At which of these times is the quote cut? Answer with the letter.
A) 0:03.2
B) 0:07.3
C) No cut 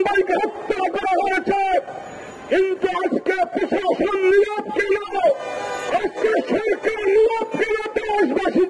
C